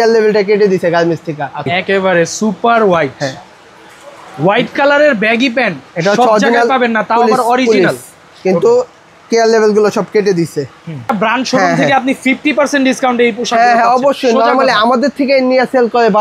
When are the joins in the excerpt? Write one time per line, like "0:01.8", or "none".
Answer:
0:01.7
0:11.1